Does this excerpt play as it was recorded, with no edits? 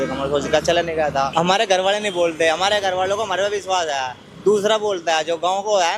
no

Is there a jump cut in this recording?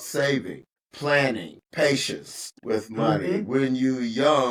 no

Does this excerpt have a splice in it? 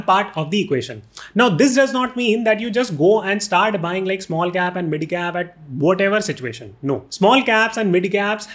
yes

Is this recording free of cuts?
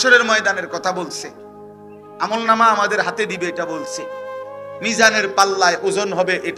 yes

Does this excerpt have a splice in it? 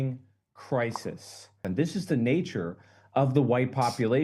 yes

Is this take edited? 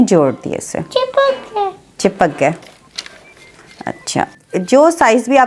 yes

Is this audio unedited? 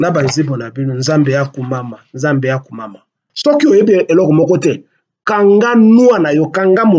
no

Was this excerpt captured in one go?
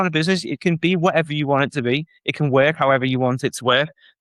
yes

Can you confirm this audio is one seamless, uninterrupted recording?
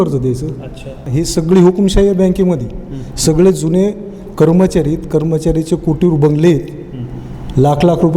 no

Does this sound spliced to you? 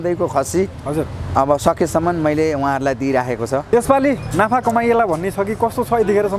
yes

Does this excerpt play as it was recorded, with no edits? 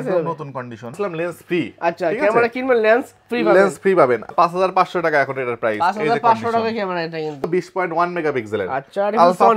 no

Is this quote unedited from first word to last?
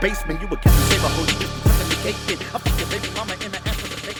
yes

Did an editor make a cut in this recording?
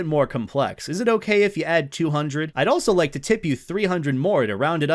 no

